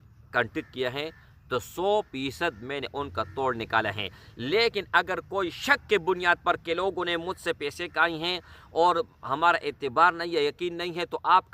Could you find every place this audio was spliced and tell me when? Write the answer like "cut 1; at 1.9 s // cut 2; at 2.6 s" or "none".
none